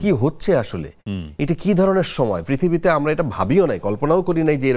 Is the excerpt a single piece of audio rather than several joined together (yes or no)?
yes